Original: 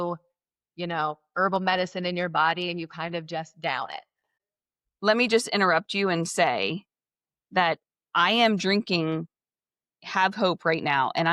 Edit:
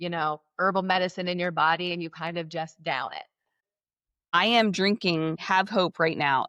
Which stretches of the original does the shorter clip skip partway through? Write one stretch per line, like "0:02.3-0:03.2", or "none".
0:04.9-0:07.9
0:09.3-0:10.1